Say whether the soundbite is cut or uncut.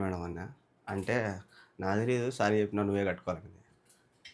uncut